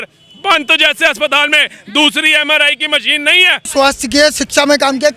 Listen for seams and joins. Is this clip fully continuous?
no; 1 cut; at 3.6 s

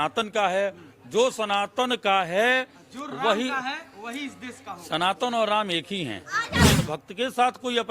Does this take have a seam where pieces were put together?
yes; 1 cut; at 6.6 s

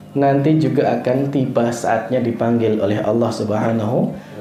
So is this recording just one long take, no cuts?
yes; 0 cuts

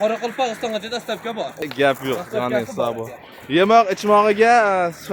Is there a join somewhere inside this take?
no; 0 cuts

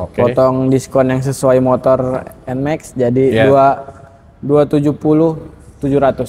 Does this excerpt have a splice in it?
no; 0 cuts

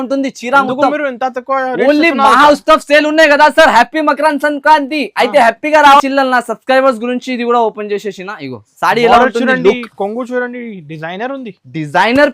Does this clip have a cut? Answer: yes; 1 cut; at 6.0 s

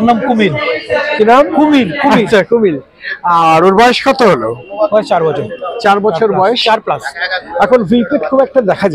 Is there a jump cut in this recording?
no; 0 cuts

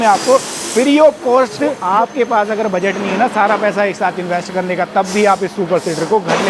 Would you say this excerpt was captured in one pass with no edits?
no; 1 cut; at 1.8 s

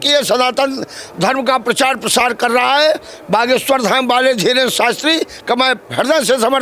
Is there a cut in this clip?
no; 0 cuts

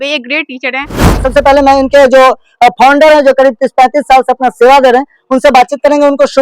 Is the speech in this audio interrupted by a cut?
yes; 1 cut; at 1.2 s

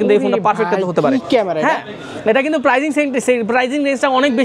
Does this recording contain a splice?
no; 0 cuts

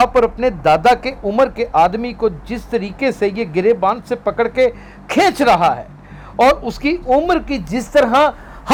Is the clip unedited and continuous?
yes; 0 cuts

